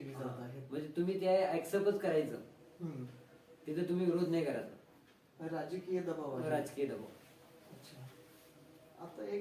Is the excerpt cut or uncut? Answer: uncut